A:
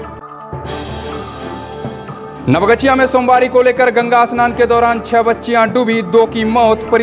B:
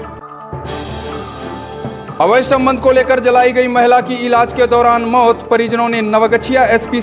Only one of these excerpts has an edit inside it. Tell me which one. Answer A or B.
B